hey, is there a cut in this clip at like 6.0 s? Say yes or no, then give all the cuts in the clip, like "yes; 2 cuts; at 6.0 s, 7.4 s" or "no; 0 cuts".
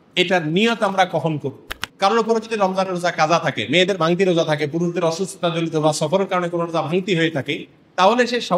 no; 1 cut; at 1.7 s